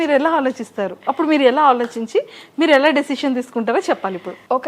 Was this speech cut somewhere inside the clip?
no; 0 cuts

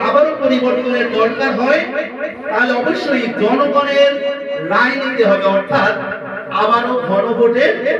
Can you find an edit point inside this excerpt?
no; 0 cuts

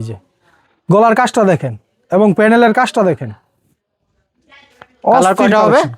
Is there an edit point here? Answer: no; 0 cuts

